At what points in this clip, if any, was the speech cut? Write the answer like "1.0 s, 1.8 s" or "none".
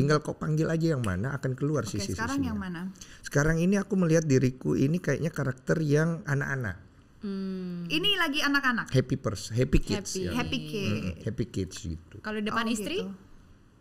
none